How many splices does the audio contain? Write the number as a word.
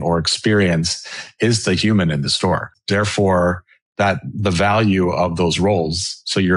one